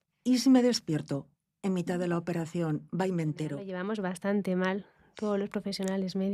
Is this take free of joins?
no; 1 cut; at 3.6 s

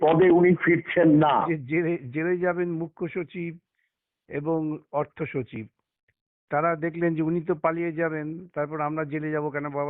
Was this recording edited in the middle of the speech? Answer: yes; 1 cut; at 1.3 s

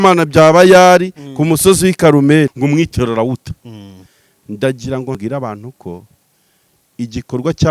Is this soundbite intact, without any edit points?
no; 2 cuts; at 2.6 s, 5.2 s

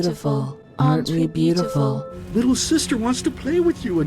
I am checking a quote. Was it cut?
yes; 1 cut; at 2.1 s

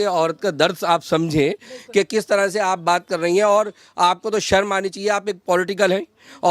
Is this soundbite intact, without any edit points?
yes; 0 cuts

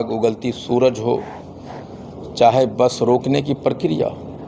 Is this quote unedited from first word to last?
yes; 0 cuts

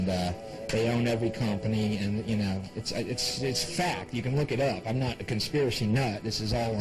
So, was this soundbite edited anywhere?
no; 0 cuts

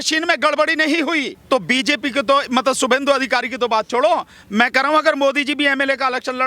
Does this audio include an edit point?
yes; 1 cut; at 1.3 s

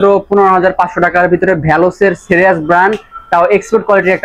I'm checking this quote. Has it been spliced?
no; 0 cuts

